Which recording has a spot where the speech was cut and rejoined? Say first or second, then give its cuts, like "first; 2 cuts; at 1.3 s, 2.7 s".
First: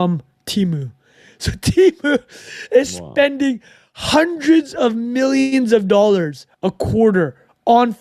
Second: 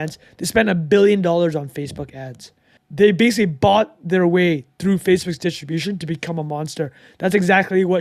second; 1 cut; at 2.8 s